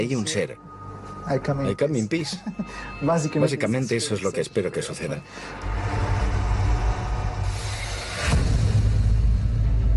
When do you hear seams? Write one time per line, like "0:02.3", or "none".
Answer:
0:05.2